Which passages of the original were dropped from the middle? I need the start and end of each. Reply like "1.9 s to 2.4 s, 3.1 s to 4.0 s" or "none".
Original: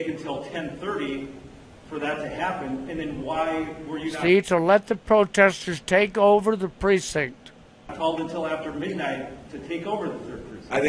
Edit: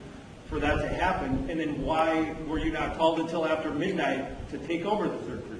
4.1 s to 7.7 s